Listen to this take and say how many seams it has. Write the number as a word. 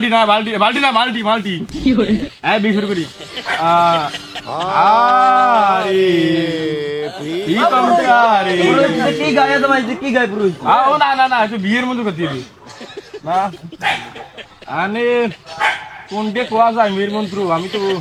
zero